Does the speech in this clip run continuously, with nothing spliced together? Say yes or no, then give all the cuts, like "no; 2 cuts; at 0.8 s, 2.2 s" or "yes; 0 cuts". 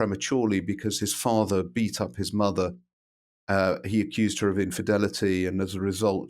yes; 0 cuts